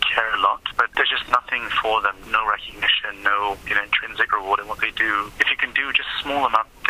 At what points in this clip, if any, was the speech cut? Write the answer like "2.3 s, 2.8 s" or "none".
0.9 s, 2.2 s, 3.7 s, 5.4 s